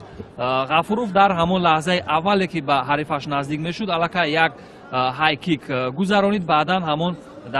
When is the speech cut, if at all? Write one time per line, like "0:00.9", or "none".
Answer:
0:03.8